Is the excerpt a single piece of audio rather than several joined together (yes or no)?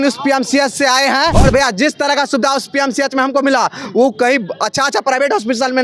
no